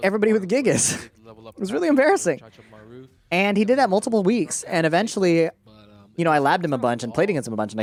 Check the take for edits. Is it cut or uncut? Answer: uncut